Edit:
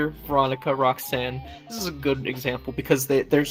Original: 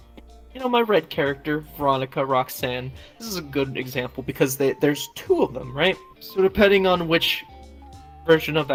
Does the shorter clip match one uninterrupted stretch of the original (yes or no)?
yes